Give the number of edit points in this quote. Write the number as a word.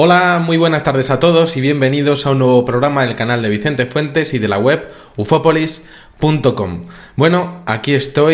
zero